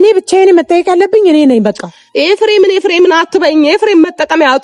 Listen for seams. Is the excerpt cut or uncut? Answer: uncut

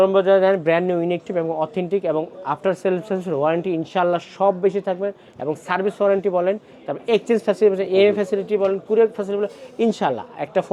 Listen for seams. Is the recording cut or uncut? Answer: uncut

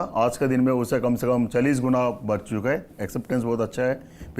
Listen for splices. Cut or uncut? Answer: uncut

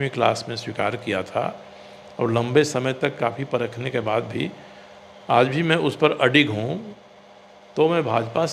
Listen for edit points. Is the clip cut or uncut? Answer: uncut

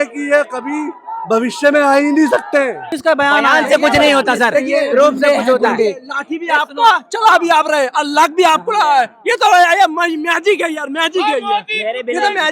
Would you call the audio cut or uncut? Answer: cut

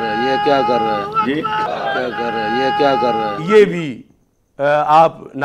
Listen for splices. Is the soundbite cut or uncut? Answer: cut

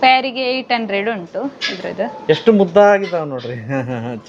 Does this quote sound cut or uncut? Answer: uncut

